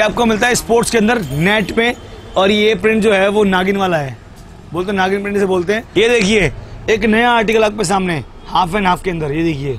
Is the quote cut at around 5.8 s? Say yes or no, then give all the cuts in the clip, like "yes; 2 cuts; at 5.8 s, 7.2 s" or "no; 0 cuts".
yes; 1 cut; at 5.8 s